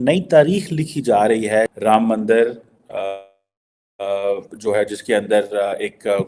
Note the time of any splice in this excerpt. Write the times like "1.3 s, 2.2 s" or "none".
1.7 s